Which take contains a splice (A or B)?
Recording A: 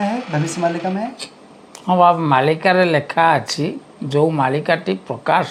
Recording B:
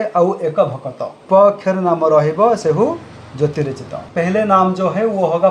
B